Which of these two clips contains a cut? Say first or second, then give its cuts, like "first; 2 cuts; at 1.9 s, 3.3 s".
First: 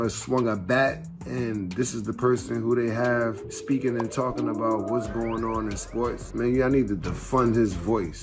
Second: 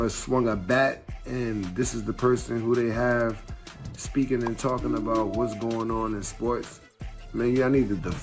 first; 2 cuts; at 3.5 s, 6.2 s